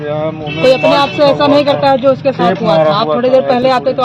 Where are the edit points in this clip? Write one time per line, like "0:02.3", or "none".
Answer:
none